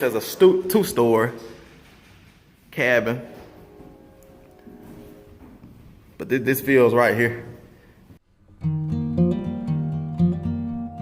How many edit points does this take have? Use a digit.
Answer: 1